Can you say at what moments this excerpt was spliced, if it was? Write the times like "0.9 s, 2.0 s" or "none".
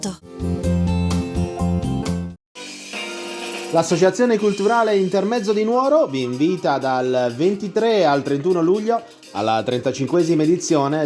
2.2 s